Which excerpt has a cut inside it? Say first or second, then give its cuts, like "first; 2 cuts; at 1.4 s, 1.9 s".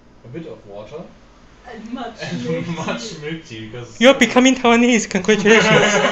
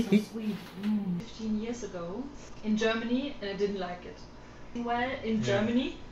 second; 3 cuts; at 1.2 s, 2.4 s, 4.7 s